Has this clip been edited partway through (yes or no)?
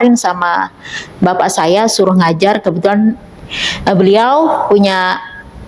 no